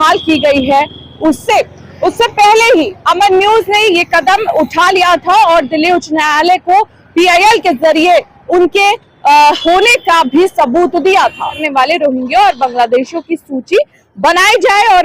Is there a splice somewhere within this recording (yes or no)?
yes